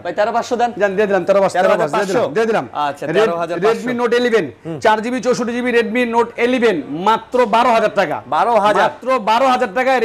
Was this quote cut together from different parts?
no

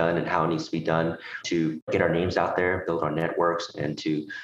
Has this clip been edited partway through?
yes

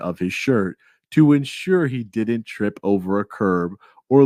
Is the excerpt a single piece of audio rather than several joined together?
yes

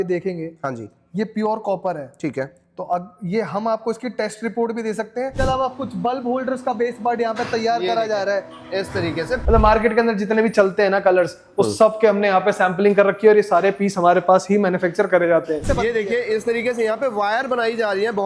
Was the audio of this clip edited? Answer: yes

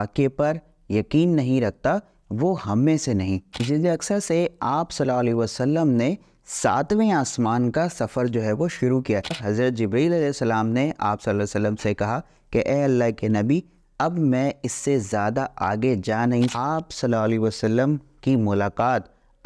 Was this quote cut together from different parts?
yes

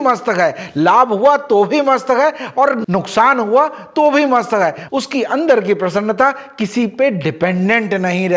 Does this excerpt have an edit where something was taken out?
no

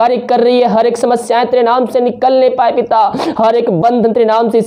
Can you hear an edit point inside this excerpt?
no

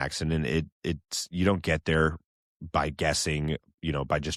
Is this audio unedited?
yes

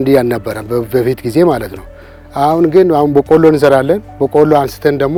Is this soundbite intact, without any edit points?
yes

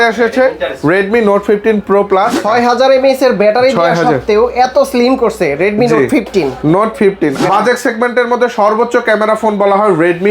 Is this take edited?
yes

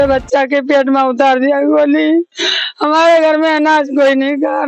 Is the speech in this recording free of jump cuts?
yes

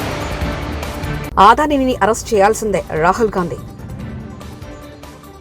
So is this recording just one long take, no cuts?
no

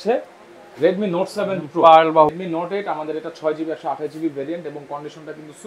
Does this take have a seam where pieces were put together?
yes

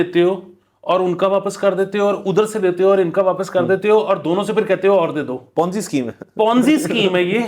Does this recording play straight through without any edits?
yes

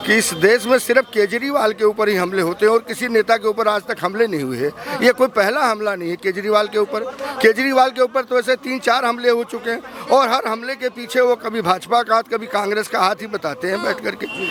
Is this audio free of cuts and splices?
yes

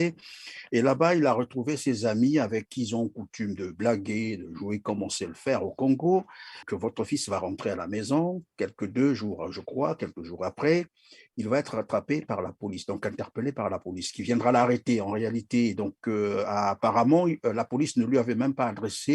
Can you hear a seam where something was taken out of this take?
yes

